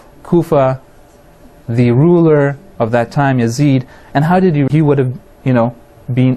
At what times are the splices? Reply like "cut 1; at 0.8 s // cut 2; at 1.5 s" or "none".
none